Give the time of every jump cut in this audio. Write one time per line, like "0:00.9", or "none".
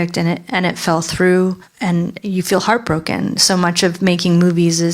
0:01.7